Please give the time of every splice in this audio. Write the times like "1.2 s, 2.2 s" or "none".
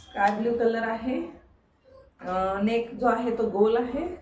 none